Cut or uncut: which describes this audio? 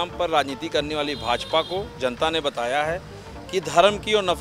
uncut